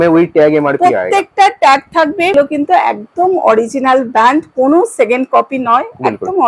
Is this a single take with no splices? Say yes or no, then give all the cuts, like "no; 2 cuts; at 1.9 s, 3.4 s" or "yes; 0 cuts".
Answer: no; 1 cut; at 2.3 s